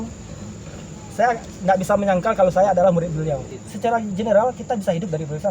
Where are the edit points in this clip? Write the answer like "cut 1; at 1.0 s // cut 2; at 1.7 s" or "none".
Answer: cut 1; at 3.5 s